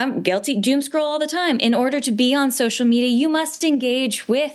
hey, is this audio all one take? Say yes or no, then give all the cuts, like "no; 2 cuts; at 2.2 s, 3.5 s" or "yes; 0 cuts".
yes; 0 cuts